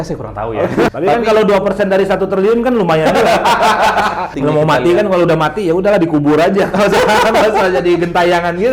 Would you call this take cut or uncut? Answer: cut